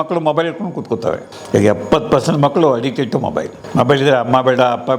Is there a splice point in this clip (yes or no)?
yes